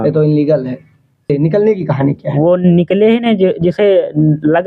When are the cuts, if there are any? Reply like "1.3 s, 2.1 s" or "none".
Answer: 1.3 s